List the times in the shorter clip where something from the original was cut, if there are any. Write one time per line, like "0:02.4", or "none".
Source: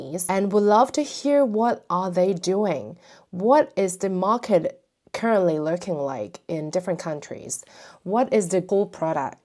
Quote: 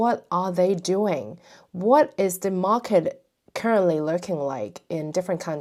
none